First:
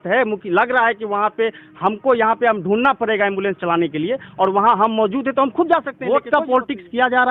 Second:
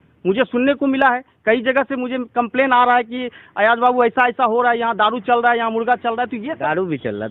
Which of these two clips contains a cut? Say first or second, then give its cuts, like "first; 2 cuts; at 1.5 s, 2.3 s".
first; 1 cut; at 6.2 s